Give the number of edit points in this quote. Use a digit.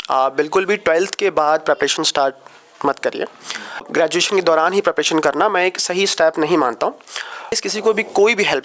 2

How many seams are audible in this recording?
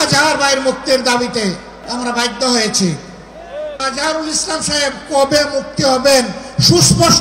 2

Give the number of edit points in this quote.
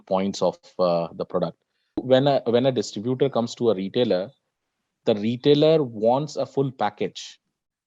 1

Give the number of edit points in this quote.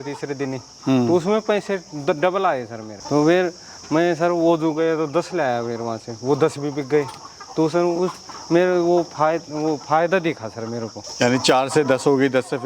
0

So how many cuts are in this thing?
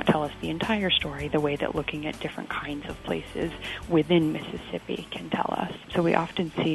1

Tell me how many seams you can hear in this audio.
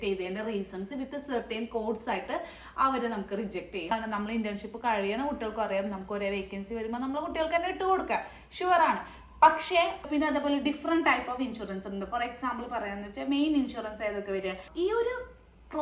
3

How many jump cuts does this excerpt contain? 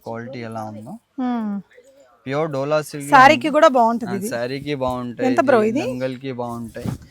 0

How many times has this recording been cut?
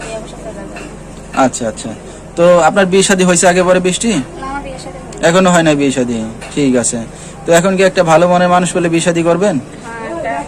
0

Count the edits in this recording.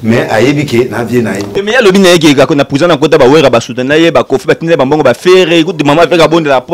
1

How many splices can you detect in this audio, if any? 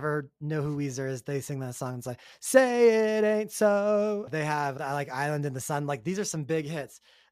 1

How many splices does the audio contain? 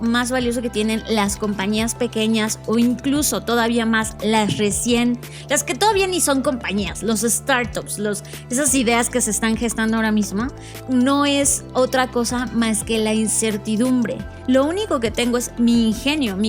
2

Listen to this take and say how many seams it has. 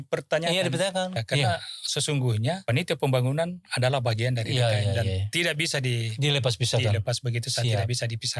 2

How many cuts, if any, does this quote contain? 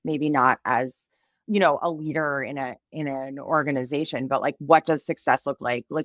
1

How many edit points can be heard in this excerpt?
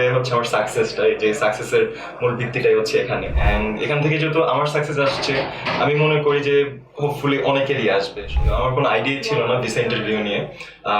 2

